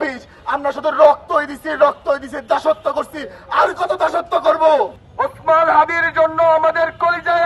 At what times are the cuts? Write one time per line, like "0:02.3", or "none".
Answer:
0:05.0